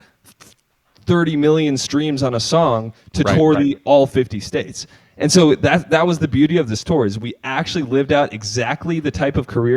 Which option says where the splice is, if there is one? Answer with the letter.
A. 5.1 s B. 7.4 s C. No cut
C